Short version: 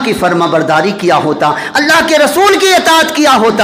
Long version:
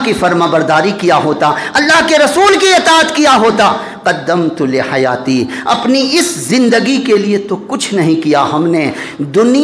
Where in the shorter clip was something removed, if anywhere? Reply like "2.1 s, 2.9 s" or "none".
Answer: none